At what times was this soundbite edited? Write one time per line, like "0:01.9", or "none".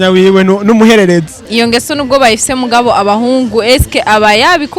0:01.4

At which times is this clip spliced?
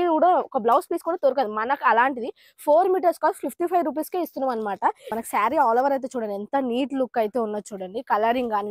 0:05.1

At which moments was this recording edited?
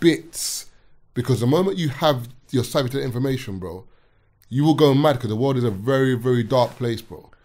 none

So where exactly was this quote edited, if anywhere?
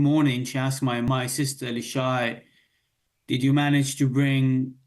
0:01.1

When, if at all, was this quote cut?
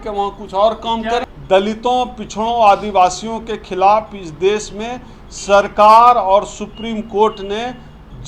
0:01.3

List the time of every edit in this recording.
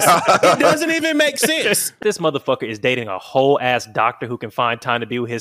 0:01.9

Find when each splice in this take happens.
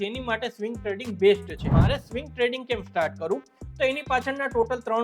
0:01.7

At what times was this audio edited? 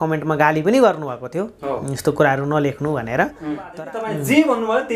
0:03.7

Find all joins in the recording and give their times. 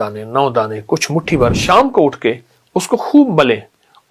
0:01.6

